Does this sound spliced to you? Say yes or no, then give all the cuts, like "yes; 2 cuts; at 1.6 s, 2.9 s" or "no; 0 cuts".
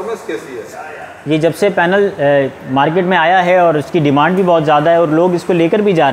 no; 0 cuts